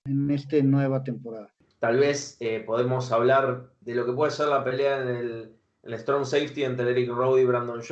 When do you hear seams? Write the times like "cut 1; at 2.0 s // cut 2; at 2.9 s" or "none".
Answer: cut 1; at 1.6 s